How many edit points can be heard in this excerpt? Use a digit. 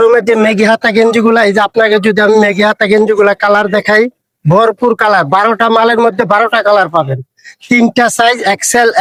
0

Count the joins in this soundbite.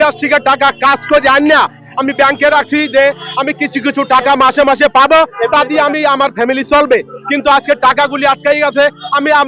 0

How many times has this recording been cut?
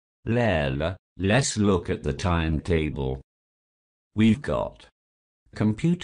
1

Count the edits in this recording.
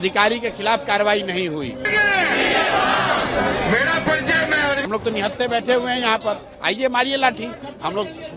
2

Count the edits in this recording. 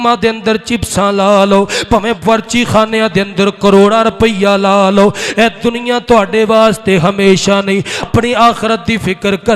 1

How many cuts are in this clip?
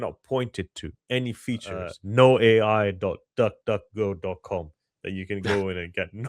1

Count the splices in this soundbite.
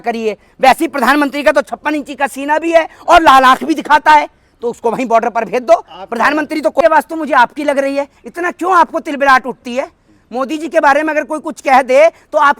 1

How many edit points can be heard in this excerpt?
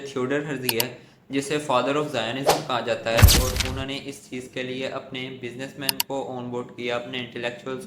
1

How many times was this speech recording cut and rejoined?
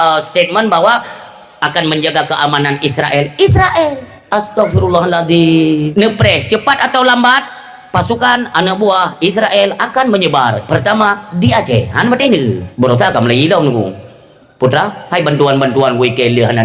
3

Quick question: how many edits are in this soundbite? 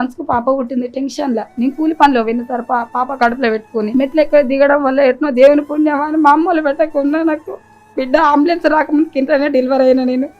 1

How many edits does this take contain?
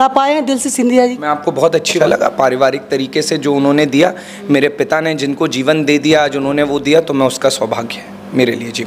1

